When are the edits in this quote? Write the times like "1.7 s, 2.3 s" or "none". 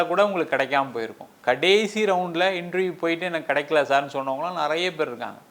none